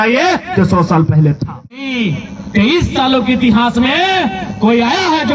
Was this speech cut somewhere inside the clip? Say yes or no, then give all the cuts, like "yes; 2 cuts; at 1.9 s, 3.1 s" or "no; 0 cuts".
yes; 1 cut; at 1.9 s